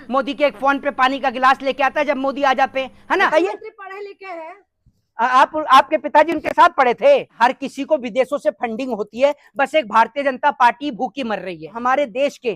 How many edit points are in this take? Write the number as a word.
three